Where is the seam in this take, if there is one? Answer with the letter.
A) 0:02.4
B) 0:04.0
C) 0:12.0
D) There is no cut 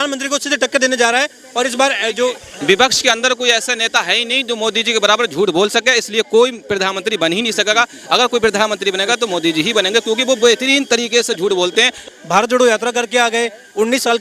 C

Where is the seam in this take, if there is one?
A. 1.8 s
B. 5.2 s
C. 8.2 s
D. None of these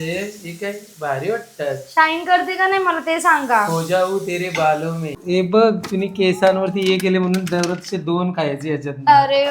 B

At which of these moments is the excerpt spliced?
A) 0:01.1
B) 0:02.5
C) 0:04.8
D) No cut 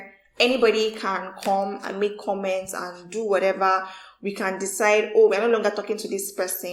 D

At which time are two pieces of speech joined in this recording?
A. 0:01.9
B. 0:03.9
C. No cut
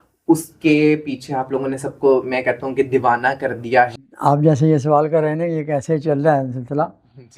B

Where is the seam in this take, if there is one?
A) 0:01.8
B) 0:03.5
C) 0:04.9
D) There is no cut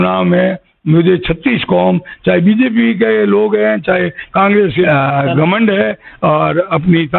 C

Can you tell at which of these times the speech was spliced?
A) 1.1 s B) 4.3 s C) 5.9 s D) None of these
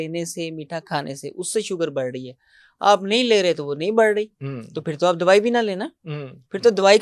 D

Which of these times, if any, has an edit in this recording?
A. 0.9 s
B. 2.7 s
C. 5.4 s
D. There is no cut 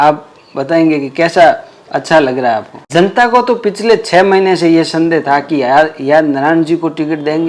B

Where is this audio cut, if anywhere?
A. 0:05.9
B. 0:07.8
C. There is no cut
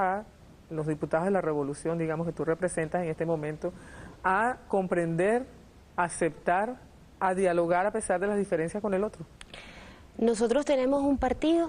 B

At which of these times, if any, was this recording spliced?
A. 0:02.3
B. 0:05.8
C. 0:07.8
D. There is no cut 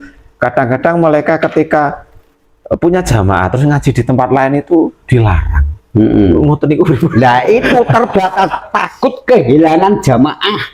D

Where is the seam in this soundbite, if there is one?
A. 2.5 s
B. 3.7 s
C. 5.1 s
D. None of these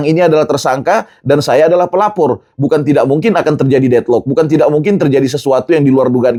D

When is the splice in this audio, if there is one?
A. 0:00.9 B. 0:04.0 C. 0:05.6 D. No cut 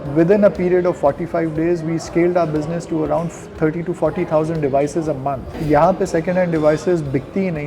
C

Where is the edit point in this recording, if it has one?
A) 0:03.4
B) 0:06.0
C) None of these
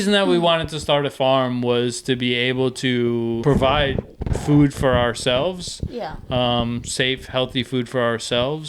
A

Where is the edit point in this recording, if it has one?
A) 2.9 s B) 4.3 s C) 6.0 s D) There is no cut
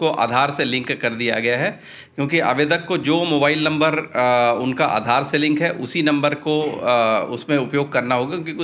D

